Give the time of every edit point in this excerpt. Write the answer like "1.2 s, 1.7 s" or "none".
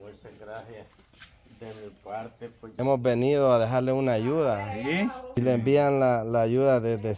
2.7 s, 5.3 s